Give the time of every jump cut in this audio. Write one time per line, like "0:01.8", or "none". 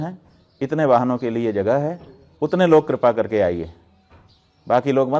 none